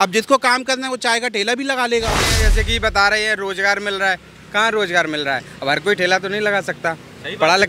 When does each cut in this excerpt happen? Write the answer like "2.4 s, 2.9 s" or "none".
2.4 s